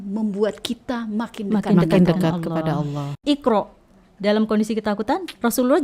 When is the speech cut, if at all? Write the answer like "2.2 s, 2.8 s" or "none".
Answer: 3.1 s